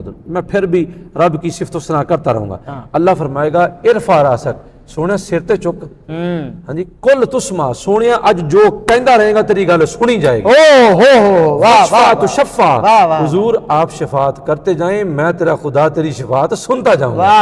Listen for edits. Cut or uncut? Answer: uncut